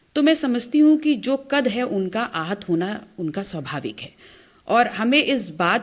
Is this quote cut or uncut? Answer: uncut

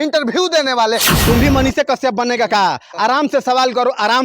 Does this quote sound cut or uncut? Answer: cut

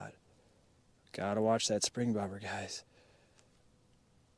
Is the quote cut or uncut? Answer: uncut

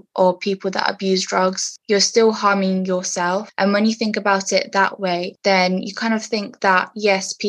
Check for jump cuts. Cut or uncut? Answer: cut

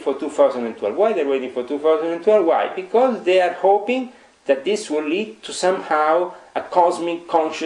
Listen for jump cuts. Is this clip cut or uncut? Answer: uncut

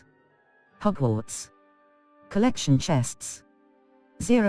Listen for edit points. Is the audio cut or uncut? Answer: uncut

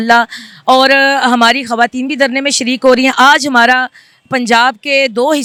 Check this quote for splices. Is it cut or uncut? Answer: uncut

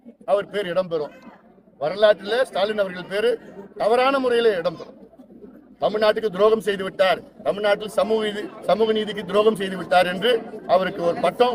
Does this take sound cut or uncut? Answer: uncut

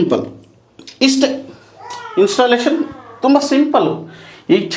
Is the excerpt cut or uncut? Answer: uncut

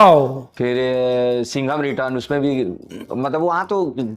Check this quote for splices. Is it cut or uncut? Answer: uncut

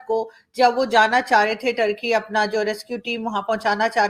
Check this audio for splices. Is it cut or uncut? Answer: uncut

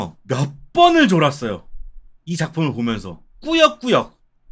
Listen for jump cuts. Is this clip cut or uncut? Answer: uncut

